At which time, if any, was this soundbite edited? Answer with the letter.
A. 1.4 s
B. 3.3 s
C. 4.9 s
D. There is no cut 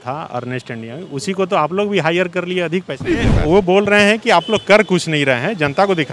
B